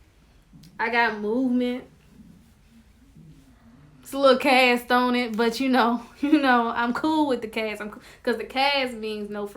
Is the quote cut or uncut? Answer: uncut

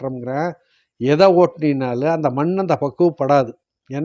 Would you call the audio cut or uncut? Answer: uncut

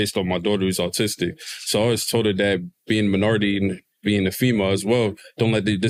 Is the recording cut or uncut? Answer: uncut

